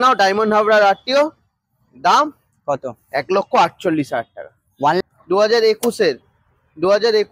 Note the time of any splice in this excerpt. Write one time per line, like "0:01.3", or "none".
0:05.0